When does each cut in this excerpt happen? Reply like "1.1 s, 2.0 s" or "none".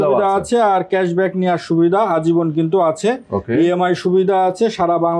none